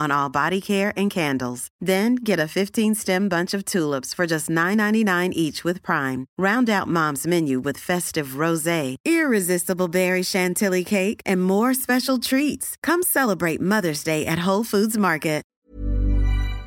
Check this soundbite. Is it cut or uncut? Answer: cut